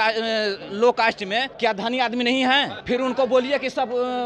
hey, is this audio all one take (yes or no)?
no